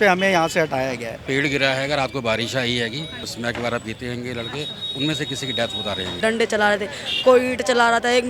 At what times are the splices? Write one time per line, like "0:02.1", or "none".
0:01.2
0:03.3
0:06.1